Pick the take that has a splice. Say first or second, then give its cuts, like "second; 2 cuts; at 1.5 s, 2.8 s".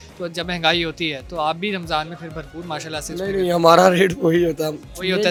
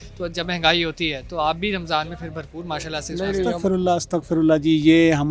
second; 1 cut; at 3.5 s